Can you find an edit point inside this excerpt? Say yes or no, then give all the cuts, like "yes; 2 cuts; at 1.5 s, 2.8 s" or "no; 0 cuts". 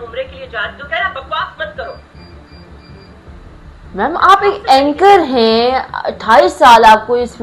no; 0 cuts